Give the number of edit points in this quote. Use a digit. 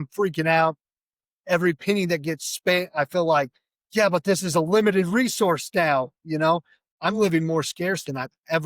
1